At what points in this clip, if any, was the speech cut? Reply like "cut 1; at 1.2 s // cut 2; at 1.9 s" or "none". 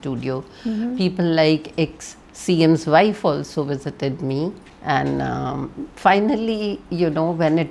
cut 1; at 4.7 s